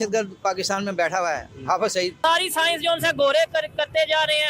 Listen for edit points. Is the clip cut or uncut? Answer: cut